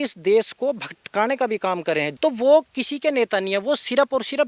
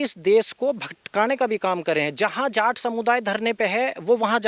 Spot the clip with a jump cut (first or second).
first